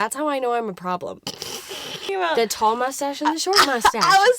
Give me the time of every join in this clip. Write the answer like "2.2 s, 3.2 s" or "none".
2.1 s